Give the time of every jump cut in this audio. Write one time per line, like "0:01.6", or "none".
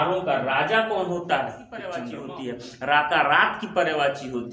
0:02.1